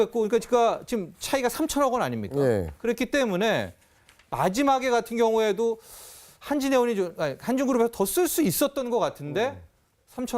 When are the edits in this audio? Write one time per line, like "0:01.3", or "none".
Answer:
0:05.8